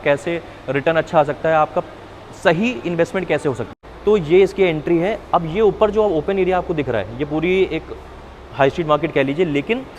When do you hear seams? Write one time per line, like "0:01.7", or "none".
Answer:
0:03.7

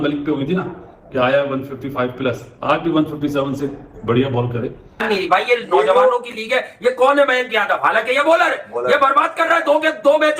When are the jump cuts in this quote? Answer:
0:05.0

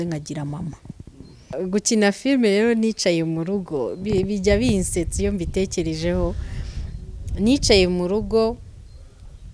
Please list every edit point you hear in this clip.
0:01.4

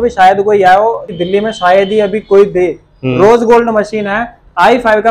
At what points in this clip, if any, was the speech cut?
0:01.1

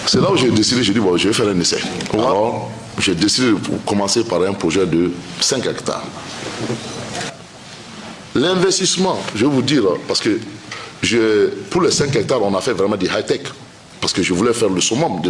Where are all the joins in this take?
0:02.3
0:07.3

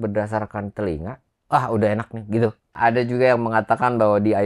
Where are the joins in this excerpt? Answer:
0:02.8

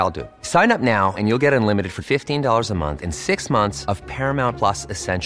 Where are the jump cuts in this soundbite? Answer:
none

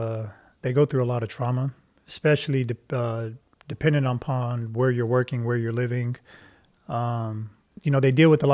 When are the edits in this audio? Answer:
none

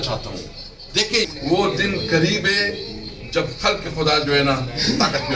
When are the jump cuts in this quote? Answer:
0:01.3

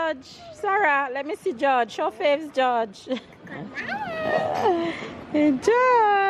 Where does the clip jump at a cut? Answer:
none

